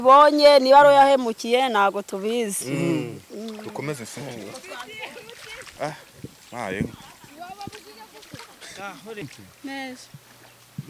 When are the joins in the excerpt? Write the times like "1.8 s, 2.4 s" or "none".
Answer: 9.2 s